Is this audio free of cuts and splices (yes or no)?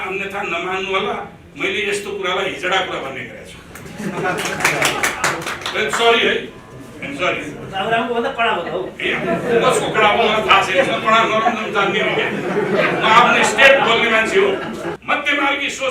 no